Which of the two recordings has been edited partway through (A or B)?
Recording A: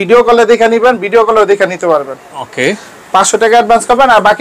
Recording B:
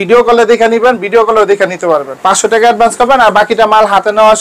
B